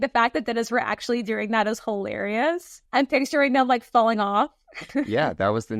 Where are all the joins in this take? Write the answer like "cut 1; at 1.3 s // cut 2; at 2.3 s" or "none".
cut 1; at 2.7 s // cut 2; at 5.1 s